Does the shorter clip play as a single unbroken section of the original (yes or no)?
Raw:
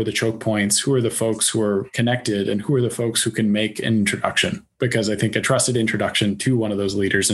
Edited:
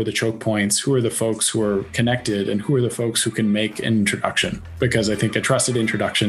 yes